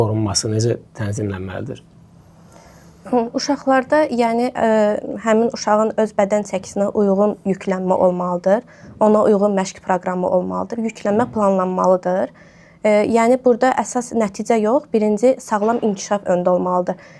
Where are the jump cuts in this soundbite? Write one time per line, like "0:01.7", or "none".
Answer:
none